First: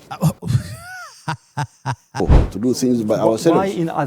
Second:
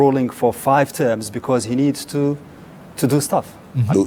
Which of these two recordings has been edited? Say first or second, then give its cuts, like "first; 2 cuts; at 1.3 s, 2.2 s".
first; 1 cut; at 2.2 s